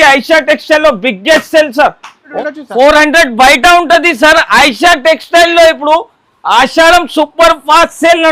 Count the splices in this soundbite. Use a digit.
1